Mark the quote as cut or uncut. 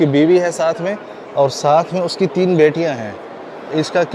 uncut